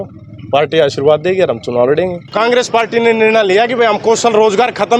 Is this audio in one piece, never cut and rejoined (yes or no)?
no